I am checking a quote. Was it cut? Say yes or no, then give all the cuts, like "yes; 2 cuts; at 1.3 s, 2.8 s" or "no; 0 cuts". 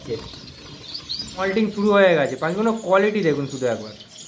yes; 1 cut; at 1.4 s